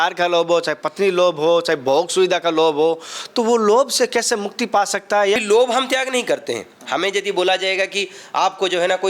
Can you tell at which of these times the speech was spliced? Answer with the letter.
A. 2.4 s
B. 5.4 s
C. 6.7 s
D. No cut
B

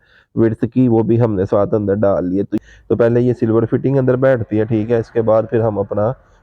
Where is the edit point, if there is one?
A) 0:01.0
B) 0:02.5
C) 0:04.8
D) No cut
B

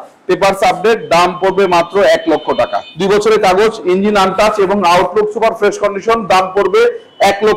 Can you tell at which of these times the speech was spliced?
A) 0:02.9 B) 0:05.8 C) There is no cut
A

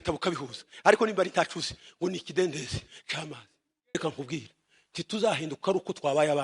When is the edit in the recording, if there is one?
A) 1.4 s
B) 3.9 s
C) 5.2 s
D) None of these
B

